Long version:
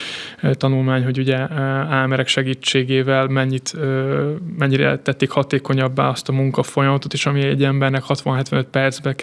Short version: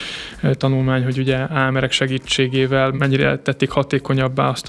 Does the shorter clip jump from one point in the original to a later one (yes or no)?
yes